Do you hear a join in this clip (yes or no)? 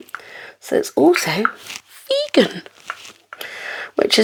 no